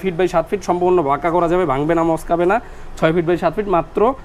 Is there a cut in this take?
no; 0 cuts

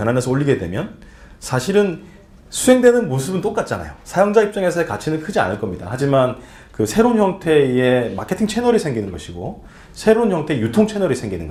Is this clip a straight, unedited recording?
yes; 0 cuts

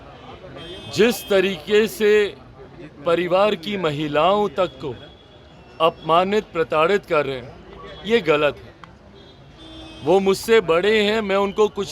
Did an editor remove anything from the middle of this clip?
no; 0 cuts

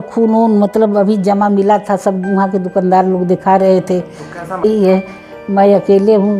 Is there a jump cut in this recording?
yes; 1 cut; at 4.6 s

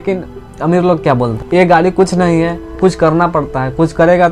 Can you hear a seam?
yes; 2 cuts; at 1.4 s, 2.6 s

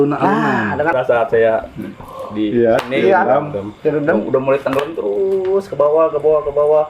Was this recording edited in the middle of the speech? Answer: yes; 1 cut; at 0.9 s

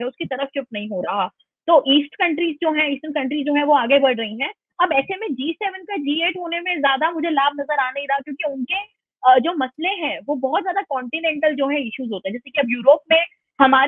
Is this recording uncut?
yes; 0 cuts

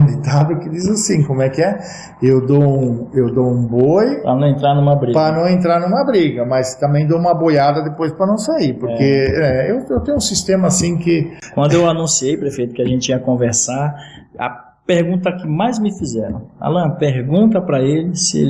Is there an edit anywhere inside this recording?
yes; 1 cut; at 11.4 s

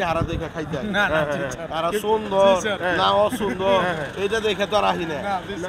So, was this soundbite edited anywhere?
no; 0 cuts

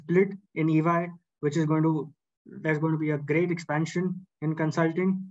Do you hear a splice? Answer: no; 0 cuts

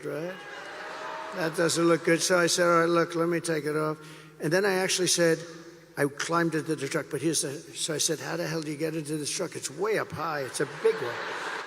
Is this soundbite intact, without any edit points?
yes; 0 cuts

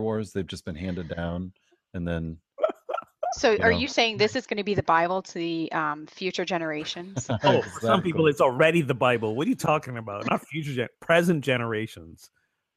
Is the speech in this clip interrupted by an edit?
no; 0 cuts

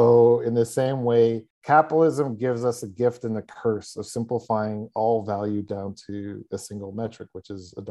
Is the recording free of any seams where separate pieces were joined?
no; 1 cut; at 1.5 s

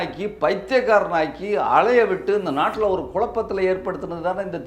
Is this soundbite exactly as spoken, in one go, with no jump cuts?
yes; 0 cuts

